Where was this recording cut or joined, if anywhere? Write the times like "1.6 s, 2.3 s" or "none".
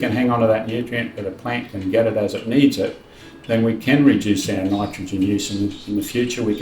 1.7 s, 4.6 s